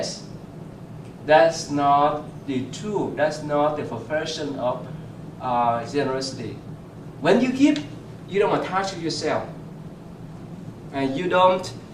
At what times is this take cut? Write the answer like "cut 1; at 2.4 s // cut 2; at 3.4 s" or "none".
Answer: cut 1; at 1.9 s